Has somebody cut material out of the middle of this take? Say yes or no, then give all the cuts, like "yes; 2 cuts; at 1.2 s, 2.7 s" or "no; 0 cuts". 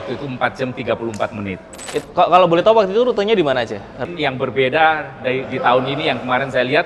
yes; 2 cuts; at 1.9 s, 4.0 s